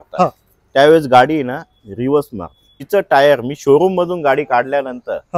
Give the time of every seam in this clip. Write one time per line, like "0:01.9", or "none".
0:02.8